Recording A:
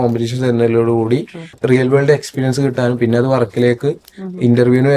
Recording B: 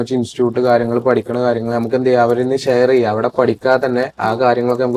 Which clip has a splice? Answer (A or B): A